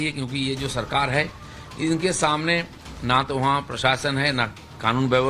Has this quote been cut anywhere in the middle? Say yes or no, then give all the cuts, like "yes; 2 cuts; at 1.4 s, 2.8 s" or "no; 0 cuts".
yes; 1 cut; at 4.3 s